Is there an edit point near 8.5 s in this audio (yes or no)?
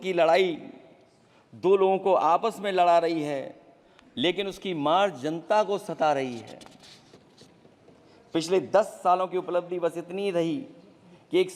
no